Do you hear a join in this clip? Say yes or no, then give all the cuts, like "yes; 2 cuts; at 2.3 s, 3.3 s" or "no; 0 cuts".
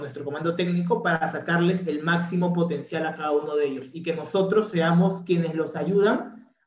no; 0 cuts